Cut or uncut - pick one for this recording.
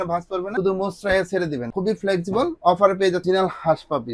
cut